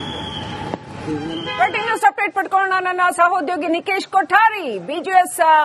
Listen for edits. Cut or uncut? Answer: cut